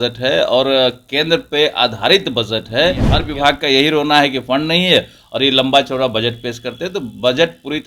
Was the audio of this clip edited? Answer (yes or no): yes